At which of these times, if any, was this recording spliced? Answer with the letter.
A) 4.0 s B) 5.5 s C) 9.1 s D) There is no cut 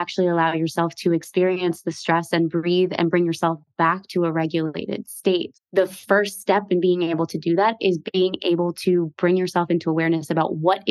B